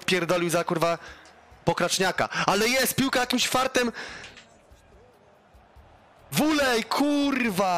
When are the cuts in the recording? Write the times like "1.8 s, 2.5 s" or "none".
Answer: none